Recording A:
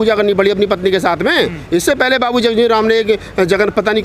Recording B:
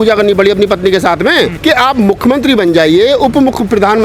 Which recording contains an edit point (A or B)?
B